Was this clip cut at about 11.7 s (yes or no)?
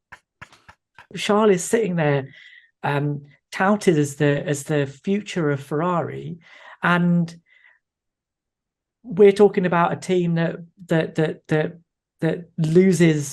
no